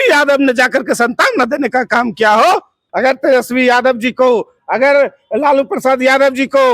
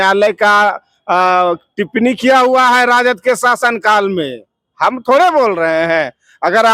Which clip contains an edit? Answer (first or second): first